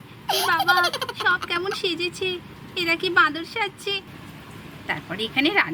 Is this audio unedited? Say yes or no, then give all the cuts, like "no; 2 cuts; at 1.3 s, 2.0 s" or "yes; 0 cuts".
yes; 0 cuts